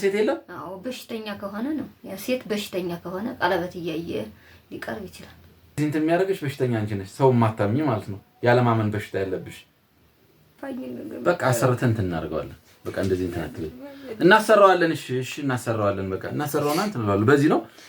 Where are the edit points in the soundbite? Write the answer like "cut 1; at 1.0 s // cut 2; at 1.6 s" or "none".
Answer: cut 1; at 5.8 s // cut 2; at 10.6 s